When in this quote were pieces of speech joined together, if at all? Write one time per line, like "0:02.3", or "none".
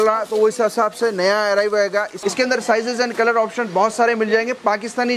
0:02.1